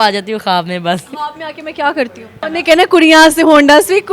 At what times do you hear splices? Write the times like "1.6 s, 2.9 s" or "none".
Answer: 2.4 s